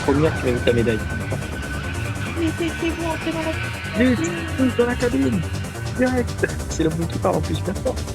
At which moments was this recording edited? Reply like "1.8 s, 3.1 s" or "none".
none